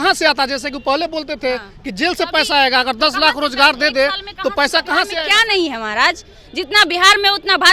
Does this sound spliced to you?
yes; 1 cut; at 5.2 s

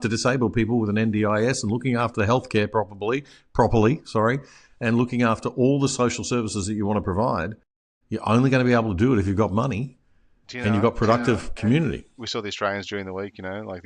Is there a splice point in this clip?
yes; 1 cut; at 12.2 s

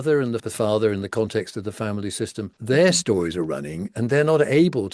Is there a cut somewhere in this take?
no; 0 cuts

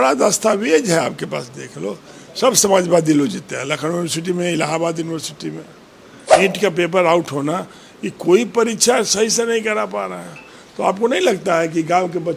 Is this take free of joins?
no; 1 cut; at 6.4 s

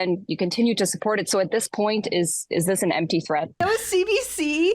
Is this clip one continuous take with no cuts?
no; 1 cut; at 3.6 s

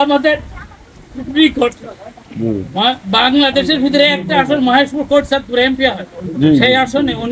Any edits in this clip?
no; 0 cuts

